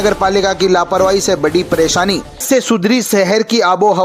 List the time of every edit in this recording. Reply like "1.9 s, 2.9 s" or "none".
2.3 s